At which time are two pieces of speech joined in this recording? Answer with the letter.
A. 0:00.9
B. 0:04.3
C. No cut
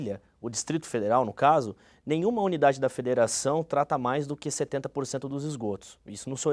C